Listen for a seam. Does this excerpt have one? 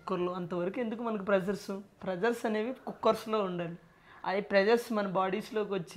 no; 0 cuts

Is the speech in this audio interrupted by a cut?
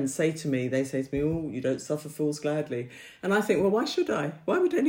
no; 0 cuts

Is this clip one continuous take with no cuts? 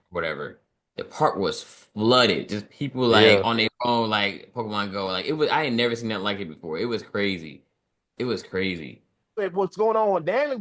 no; 1 cut; at 9.4 s

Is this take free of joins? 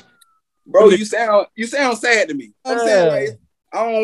no; 1 cut; at 2.6 s

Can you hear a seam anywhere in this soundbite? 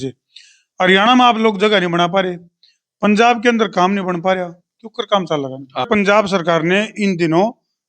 yes; 1 cut; at 5.9 s

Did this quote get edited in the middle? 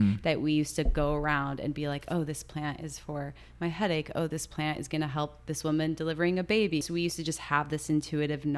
yes; 1 cut; at 6.8 s

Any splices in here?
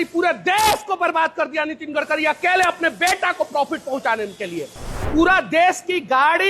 yes; 1 cut; at 5.0 s

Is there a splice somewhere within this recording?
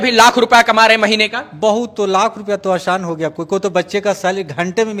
no; 0 cuts

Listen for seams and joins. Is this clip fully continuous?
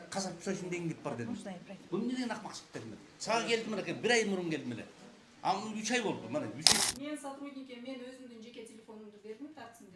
no; 1 cut; at 6.8 s

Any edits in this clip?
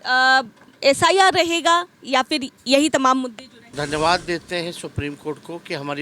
yes; 1 cut; at 3.7 s

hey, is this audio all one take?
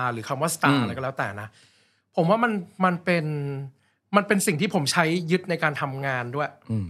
yes; 0 cuts

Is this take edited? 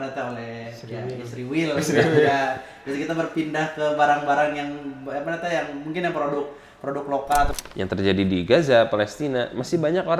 yes; 1 cut; at 7.6 s

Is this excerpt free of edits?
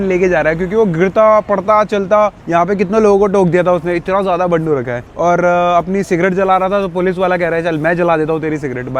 yes; 0 cuts

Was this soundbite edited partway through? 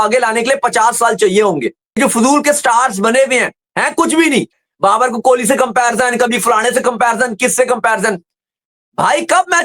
yes; 1 cut; at 2.0 s

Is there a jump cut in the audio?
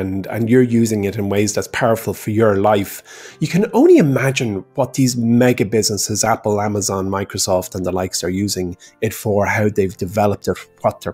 no; 0 cuts

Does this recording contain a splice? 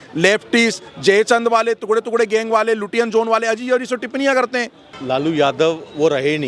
yes; 1 cut; at 4.9 s

